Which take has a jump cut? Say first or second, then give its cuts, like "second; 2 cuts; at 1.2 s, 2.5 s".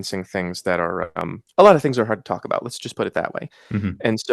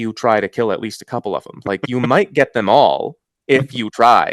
first; 1 cut; at 1.4 s